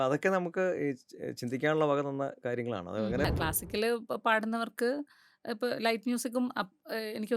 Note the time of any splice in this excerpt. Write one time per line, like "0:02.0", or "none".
0:03.3